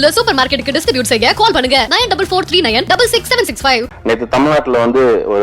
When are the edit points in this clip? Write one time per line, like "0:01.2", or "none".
0:03.9

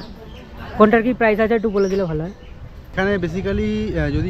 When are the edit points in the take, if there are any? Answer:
0:02.9

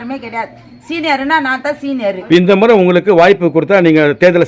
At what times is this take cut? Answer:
none

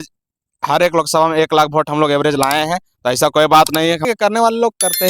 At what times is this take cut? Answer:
0:04.0

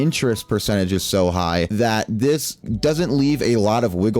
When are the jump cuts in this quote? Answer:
0:01.7

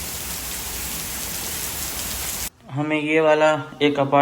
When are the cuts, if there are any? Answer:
0:02.6

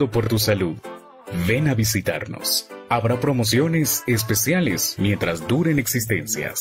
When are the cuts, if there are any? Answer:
none

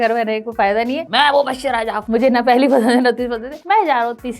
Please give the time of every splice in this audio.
0:01.0
0:02.0
0:03.5

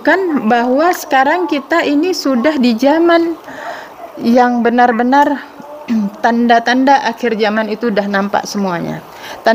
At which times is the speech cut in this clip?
none

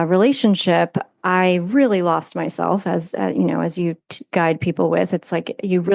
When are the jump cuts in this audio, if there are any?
none

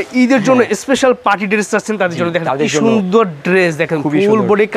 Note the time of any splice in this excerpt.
none

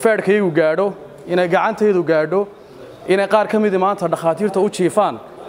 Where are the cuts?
none

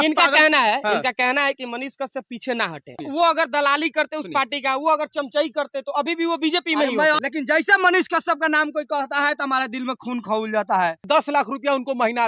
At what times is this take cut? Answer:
0:03.0
0:07.2
0:11.0

